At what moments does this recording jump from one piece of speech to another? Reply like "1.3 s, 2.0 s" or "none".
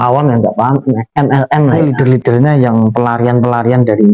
1.8 s